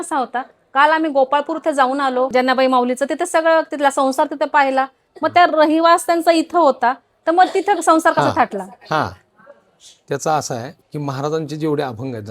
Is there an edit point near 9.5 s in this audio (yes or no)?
no